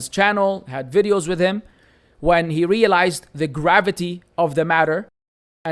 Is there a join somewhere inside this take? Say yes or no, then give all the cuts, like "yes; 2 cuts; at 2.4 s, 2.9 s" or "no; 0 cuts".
no; 0 cuts